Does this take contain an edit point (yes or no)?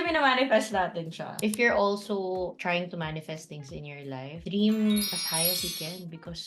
yes